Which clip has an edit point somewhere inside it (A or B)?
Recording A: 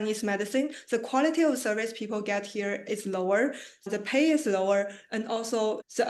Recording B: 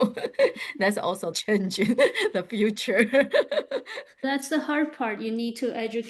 B